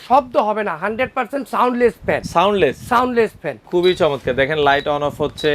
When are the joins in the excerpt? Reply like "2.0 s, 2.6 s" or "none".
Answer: 3.6 s